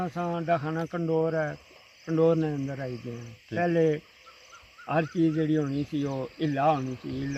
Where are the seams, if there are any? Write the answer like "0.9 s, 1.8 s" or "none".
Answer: none